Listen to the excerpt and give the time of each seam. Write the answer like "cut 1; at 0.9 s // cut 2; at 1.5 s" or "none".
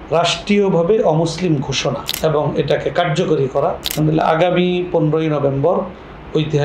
cut 1; at 2.1 s // cut 2; at 3.9 s